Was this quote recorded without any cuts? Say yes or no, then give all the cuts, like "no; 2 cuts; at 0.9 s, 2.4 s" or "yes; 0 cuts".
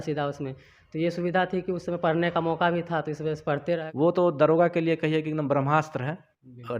no; 1 cut; at 3.8 s